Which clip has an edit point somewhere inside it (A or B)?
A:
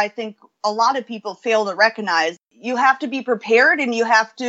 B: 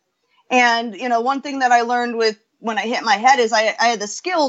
A